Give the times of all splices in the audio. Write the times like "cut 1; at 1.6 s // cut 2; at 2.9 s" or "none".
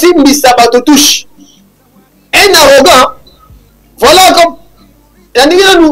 none